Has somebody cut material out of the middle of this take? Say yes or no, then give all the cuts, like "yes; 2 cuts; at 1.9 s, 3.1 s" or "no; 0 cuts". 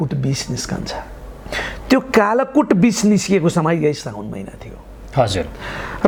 no; 0 cuts